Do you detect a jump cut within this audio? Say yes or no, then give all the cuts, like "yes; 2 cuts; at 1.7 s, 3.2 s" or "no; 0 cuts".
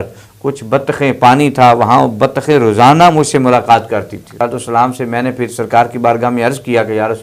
yes; 1 cut; at 4.3 s